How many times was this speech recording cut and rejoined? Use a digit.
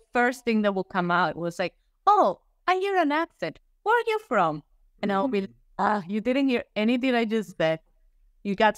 0